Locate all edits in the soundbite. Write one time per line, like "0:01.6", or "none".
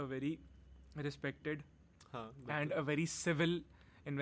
none